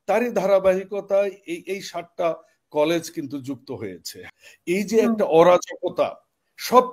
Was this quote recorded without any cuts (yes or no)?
no